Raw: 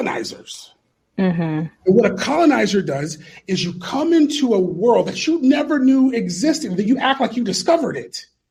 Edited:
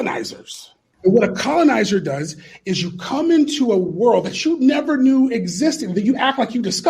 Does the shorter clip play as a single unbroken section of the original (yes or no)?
no